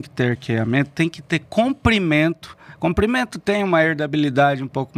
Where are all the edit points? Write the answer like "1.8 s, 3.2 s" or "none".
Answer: none